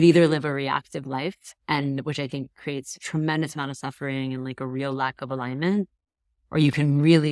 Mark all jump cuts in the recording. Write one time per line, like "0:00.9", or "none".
0:01.5